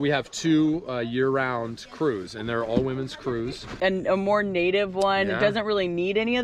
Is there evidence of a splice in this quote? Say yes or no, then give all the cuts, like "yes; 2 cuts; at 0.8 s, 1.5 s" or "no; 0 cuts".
yes; 1 cut; at 3.6 s